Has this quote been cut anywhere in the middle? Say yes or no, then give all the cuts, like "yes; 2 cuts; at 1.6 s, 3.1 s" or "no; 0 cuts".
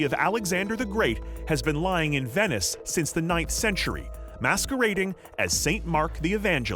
no; 0 cuts